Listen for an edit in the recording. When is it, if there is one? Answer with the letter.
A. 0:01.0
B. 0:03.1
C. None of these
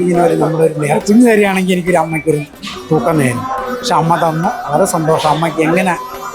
A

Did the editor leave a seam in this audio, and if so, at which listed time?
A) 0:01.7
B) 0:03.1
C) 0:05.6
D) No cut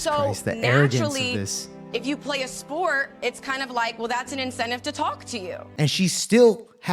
C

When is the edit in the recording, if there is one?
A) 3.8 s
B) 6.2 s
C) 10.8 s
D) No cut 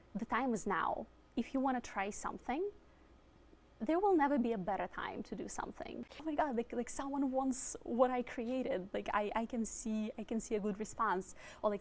B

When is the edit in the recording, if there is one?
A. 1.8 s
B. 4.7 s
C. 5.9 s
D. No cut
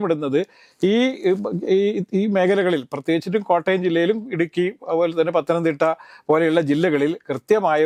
D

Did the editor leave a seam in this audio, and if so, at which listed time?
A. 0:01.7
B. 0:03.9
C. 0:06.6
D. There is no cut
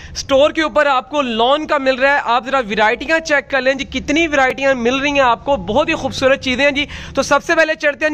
D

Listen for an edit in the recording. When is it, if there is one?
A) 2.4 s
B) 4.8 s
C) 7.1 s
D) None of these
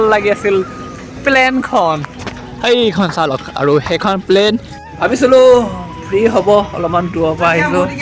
B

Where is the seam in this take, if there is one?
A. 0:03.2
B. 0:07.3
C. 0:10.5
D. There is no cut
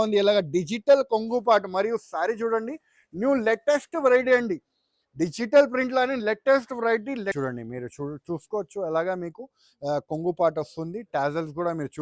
B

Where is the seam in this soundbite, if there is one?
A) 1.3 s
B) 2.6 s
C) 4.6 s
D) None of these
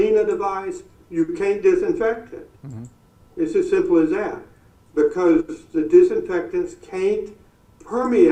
D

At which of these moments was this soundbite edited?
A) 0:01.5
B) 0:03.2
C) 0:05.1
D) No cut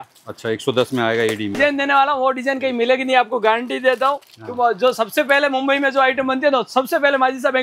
A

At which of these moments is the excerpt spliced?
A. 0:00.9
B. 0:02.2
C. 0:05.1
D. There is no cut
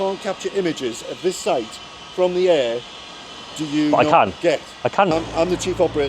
C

